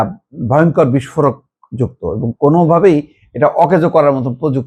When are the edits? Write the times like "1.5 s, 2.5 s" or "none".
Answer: none